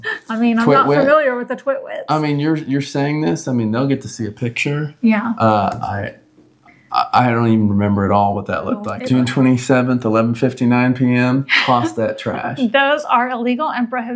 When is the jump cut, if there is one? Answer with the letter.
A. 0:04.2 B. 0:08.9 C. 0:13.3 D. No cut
B